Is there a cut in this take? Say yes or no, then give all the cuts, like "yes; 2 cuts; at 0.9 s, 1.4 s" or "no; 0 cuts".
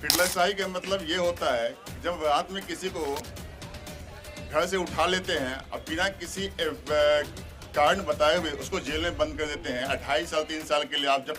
no; 0 cuts